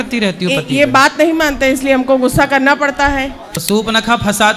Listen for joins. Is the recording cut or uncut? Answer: cut